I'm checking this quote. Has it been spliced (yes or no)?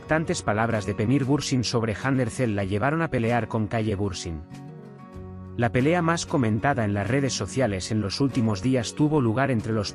no